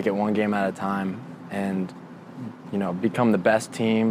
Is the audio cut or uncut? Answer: uncut